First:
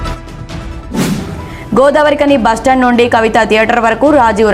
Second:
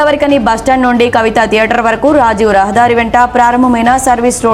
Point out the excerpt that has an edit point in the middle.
first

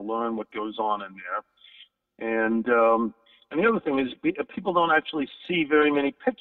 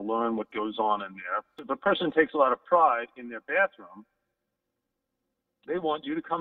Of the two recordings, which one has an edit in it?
second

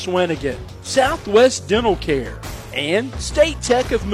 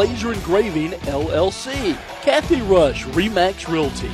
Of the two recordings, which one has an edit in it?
second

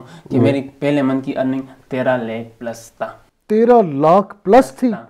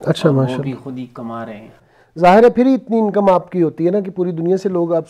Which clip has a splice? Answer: second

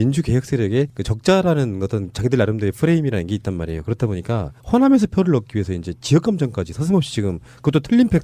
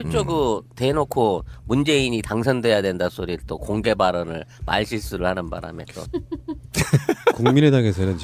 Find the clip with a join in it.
first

